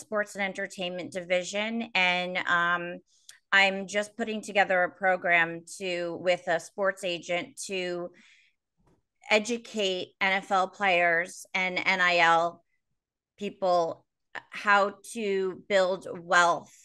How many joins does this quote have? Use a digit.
0